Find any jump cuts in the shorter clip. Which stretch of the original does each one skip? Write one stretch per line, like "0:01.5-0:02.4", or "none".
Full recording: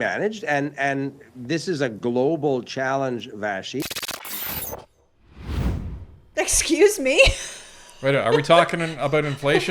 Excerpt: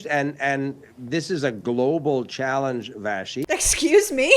0:03.8-0:06.3